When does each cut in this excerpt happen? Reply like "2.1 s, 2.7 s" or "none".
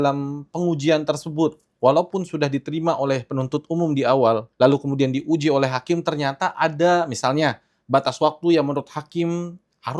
4.5 s